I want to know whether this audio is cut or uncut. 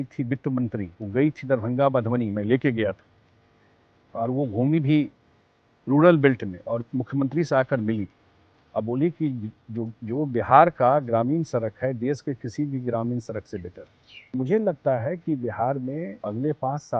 cut